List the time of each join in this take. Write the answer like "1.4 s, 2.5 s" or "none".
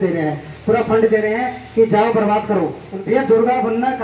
2.9 s